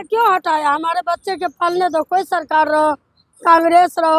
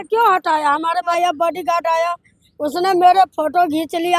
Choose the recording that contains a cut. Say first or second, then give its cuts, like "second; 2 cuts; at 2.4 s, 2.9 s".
second; 1 cut; at 1.2 s